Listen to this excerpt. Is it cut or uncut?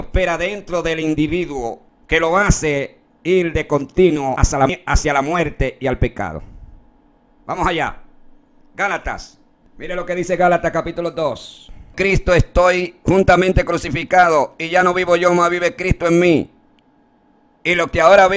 cut